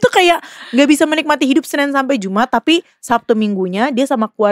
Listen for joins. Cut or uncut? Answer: uncut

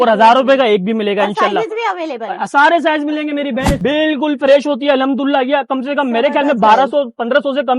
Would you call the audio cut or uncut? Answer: cut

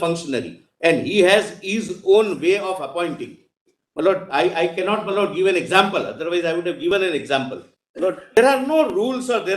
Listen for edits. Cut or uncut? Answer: cut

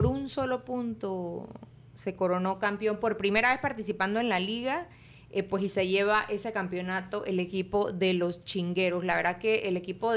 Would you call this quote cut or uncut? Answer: uncut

